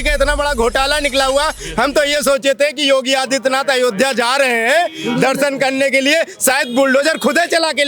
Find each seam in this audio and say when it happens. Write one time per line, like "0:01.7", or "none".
none